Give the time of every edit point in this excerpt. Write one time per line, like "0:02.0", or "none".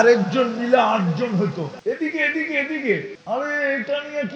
0:01.7
0:03.1